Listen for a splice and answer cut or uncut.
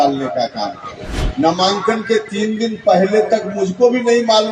cut